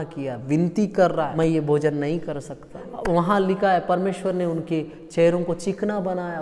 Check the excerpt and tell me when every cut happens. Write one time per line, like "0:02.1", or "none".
0:01.3
0:02.9